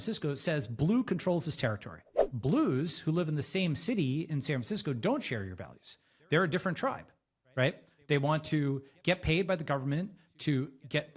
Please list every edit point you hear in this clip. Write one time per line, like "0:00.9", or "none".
0:02.2